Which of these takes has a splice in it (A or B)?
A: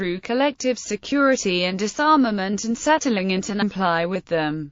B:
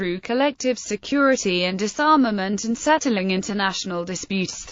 B